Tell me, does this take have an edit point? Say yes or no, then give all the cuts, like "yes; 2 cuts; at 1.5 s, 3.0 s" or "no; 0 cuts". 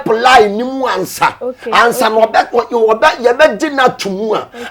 no; 0 cuts